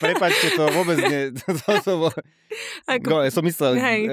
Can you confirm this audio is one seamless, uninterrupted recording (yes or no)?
yes